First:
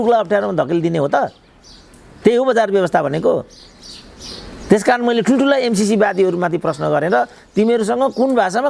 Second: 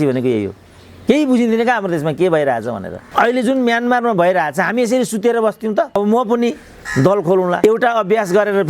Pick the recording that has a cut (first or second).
second